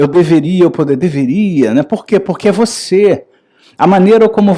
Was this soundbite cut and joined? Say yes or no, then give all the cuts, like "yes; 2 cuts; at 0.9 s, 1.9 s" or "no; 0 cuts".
no; 0 cuts